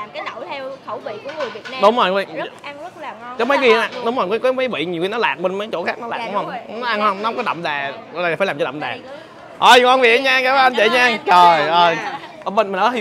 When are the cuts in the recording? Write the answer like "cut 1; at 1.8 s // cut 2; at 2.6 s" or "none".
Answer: none